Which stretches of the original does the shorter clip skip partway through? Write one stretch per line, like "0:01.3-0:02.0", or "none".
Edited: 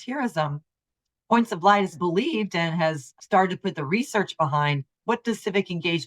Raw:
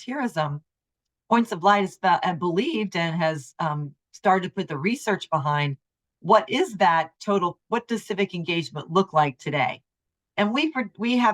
0:02.0-0:02.4
0:03.5-0:04.0
0:05.9-0:07.6

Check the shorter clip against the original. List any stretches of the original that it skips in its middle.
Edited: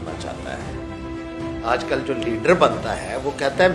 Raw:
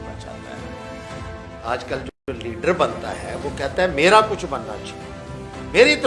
0:02.0-0:02.2

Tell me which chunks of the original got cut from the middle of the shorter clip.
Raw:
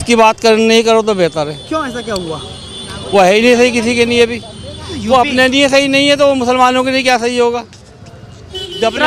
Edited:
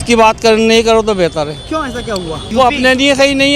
0:02.4-0:04.9

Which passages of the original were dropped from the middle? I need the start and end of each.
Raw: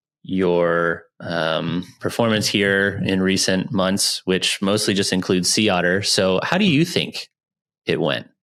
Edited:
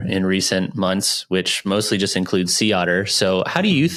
none

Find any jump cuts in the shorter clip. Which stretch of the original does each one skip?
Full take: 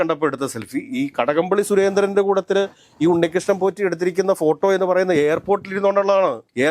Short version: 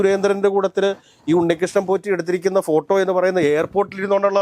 none

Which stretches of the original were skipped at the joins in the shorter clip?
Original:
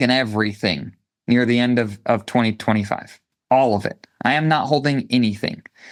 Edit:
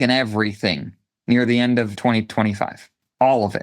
0:02.0-0:02.3

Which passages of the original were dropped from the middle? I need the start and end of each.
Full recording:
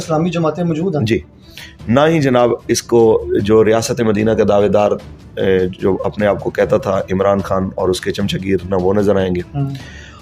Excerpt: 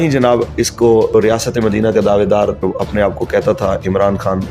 0:03.3-0:03.6
0:05.1-0:05.9

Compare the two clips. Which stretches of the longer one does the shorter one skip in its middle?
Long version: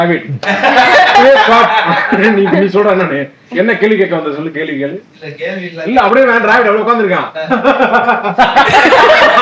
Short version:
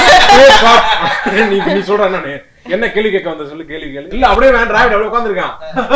0:05.0-0:05.9

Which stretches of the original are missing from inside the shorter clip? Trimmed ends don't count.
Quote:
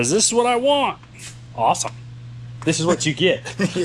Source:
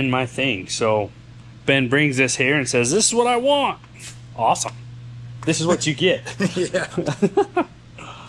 none

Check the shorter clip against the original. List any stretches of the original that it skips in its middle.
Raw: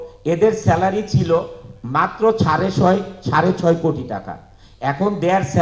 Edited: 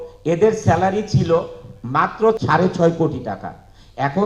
0:02.4-0:03.2

